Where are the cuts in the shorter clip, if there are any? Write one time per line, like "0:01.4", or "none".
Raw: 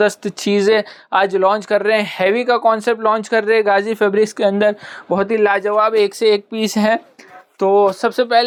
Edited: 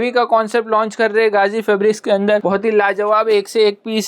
0:02.4